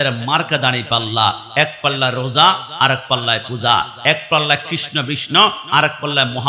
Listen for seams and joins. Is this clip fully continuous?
yes; 0 cuts

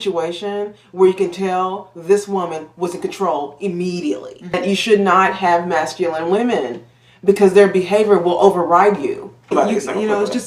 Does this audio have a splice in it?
yes; 2 cuts; at 4.7 s, 9.5 s

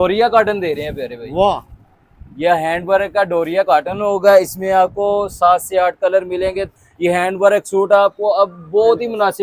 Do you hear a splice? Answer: yes; 1 cut; at 6.8 s

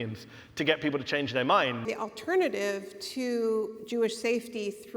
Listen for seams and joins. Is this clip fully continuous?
no; 1 cut; at 1.9 s

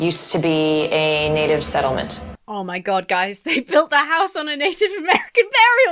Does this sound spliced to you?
no; 0 cuts

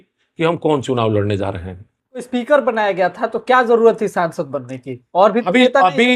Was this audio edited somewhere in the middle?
yes; 1 cut; at 2.3 s

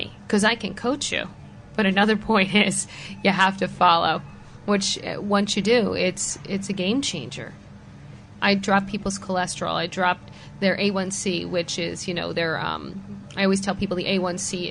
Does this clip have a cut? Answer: no; 0 cuts

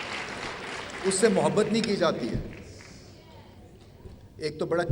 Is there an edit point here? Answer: no; 0 cuts

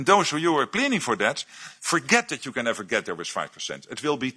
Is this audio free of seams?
yes; 0 cuts

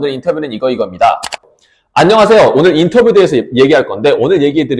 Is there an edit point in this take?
yes; 1 cut; at 1.5 s

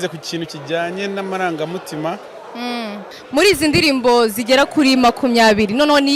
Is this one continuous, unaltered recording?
no; 1 cut; at 3.1 s

